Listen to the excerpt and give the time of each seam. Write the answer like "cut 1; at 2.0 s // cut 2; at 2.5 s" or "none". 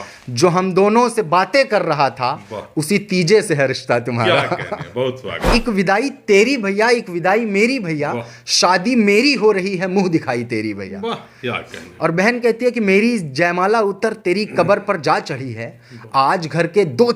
cut 1; at 5.3 s